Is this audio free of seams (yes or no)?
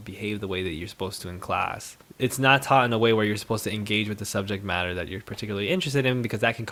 yes